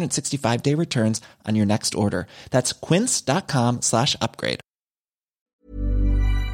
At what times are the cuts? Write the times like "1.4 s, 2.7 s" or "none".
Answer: 5.4 s